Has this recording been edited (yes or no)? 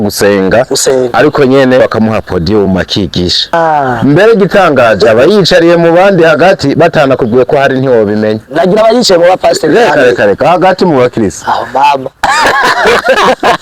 yes